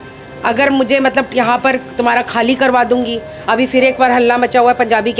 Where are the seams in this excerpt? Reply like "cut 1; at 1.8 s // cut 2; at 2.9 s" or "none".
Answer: none